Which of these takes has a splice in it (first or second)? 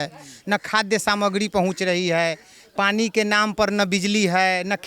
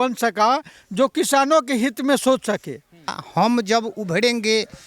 second